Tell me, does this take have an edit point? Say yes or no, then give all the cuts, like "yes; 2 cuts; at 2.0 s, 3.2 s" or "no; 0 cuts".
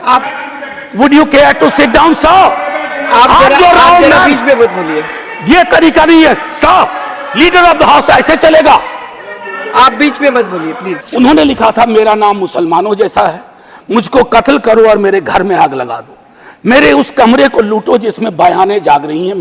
yes; 1 cut; at 10.9 s